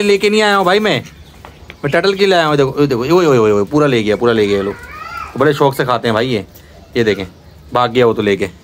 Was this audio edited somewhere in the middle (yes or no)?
no